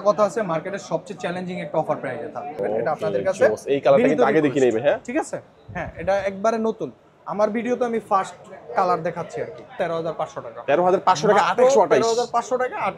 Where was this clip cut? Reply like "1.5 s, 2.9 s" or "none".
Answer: 2.6 s, 9.7 s